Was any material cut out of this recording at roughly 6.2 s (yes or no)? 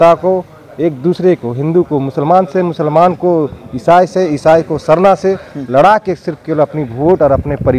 no